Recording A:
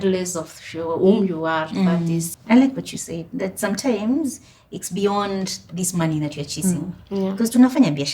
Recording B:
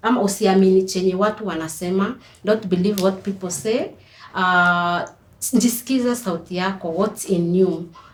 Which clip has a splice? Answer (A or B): A